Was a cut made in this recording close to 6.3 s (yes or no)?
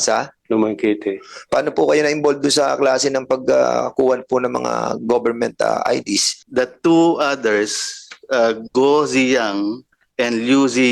yes